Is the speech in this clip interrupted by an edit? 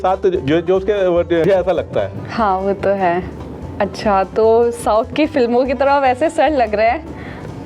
yes; 1 cut; at 1.4 s

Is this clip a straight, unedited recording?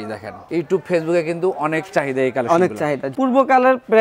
no; 1 cut; at 3.1 s

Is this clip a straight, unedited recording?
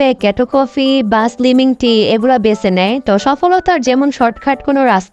yes; 0 cuts

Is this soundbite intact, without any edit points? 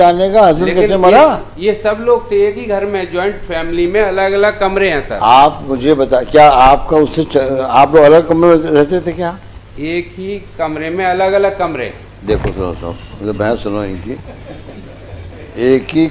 yes; 0 cuts

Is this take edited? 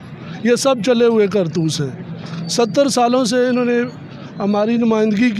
no; 0 cuts

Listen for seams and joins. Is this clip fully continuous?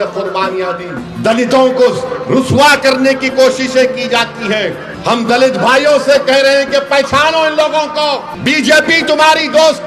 no; 3 cuts; at 1.0 s, 4.9 s, 8.3 s

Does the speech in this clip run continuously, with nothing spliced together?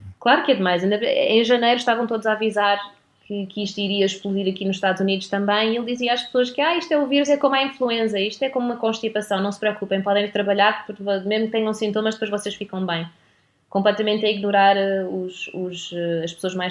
yes; 0 cuts

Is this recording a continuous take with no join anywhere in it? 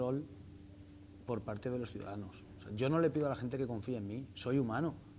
yes; 0 cuts

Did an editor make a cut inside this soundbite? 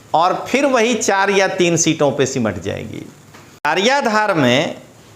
yes; 1 cut; at 3.7 s

